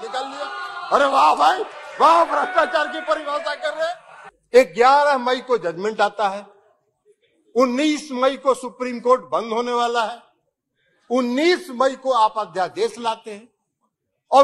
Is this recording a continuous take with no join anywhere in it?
no; 1 cut; at 4.1 s

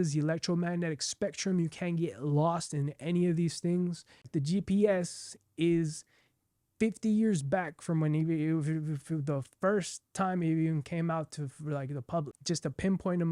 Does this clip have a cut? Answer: yes; 2 cuts; at 4.3 s, 12.3 s

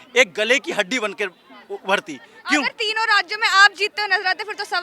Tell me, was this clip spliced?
no; 0 cuts

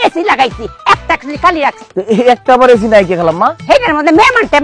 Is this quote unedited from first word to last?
yes; 0 cuts

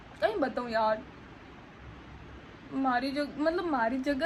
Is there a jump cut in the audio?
no; 0 cuts

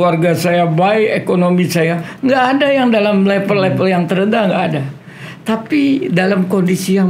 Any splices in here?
no; 0 cuts

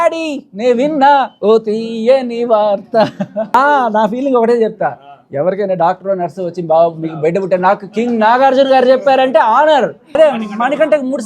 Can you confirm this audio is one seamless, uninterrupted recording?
no; 2 cuts; at 3.5 s, 10.1 s

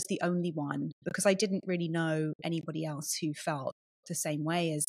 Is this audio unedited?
yes; 0 cuts

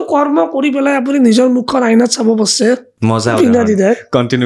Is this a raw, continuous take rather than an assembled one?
no; 1 cut; at 2.9 s

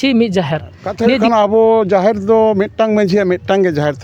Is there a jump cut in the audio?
yes; 1 cut; at 1.2 s

